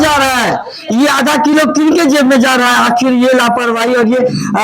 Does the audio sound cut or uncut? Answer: uncut